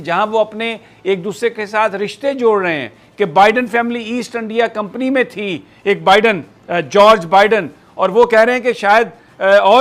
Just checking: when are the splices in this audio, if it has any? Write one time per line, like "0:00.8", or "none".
none